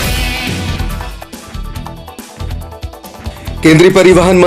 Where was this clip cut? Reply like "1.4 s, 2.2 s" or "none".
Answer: 3.5 s